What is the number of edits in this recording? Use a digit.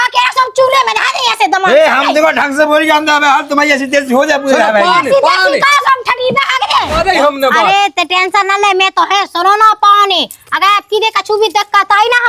1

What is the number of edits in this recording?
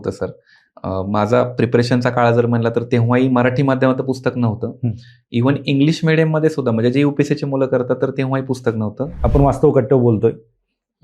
1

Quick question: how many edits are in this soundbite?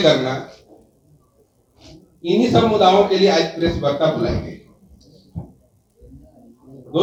0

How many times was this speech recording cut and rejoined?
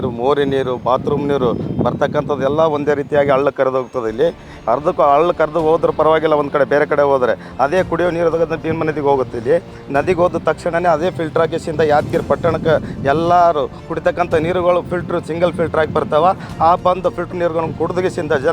0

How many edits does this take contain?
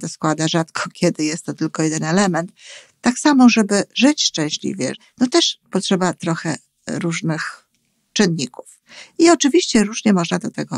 1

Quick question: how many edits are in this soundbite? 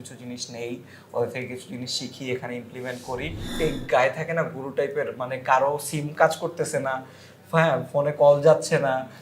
1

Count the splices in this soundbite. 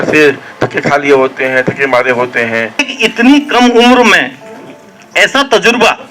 1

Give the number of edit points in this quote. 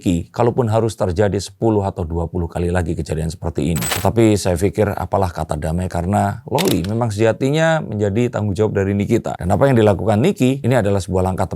1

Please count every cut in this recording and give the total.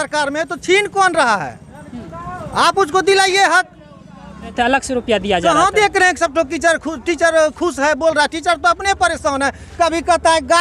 1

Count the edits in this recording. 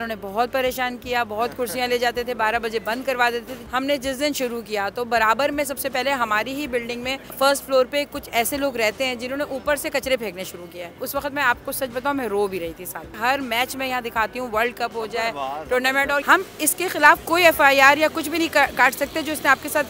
5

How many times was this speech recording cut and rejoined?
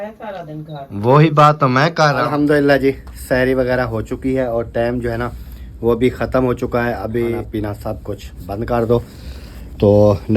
2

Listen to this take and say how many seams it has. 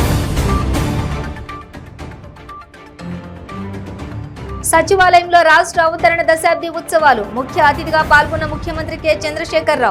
1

